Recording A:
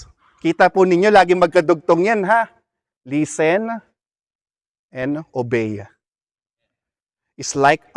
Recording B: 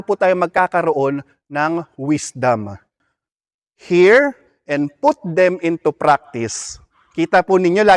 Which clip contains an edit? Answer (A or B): B